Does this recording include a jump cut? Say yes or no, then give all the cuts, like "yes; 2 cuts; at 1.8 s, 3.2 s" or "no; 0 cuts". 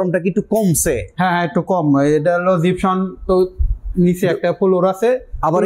no; 0 cuts